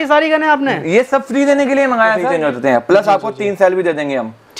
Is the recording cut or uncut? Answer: cut